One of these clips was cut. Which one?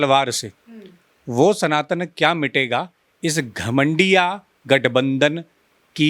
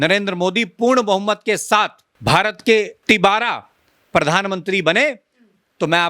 second; 2 cuts; at 2.1 s, 3.0 s

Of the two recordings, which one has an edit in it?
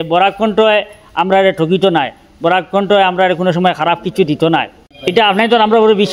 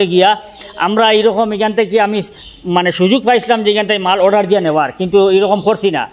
first; 1 cut; at 4.8 s

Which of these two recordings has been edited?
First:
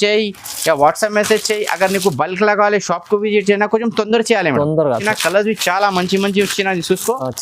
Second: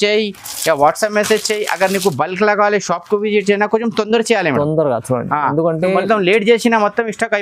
first; 1 cut; at 5.0 s

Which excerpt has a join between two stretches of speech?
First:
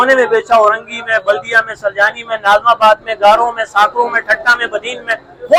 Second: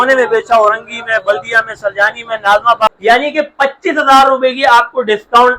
second; 1 cut; at 2.9 s

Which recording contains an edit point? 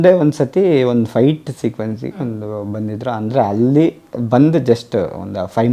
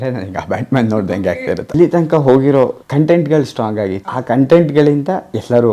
second; 3 cuts; at 1.7 s, 2.8 s, 4.1 s

